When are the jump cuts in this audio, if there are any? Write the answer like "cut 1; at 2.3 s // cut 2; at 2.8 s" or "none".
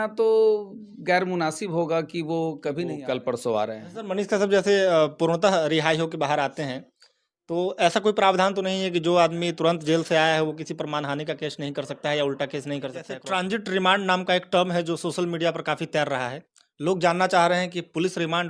cut 1; at 2.9 s // cut 2; at 3.9 s // cut 3; at 13.2 s